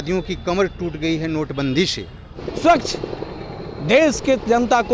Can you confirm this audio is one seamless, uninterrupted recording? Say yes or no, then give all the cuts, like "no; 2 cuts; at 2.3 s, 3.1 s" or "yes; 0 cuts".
no; 1 cut; at 2.4 s